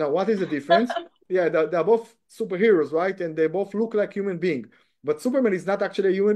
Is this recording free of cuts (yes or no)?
no